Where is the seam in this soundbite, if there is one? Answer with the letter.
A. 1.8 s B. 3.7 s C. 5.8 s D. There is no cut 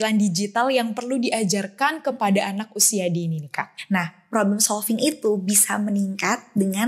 B